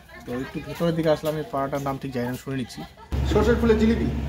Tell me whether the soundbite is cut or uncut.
cut